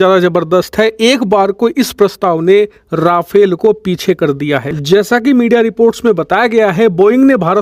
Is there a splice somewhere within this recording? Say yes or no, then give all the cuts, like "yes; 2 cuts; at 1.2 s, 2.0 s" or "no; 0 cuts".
no; 0 cuts